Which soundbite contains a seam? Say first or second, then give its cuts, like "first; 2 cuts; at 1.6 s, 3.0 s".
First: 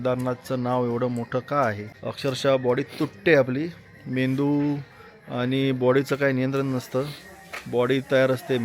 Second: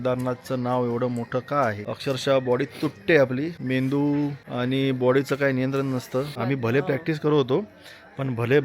second; 4 cuts; at 1.9 s, 3.6 s, 4.4 s, 6.4 s